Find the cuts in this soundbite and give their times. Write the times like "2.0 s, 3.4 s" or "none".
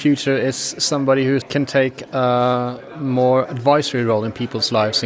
1.5 s